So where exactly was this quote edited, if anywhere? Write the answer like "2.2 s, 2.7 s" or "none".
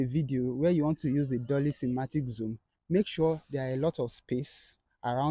none